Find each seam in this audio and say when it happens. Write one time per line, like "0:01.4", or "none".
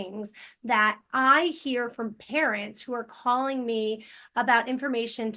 none